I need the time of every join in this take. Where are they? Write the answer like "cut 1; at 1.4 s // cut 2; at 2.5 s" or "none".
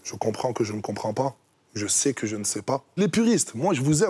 cut 1; at 2.9 s